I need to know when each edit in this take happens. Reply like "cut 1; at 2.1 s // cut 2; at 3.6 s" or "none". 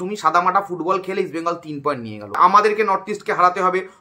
cut 1; at 2.4 s